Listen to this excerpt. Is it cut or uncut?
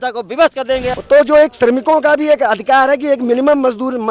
cut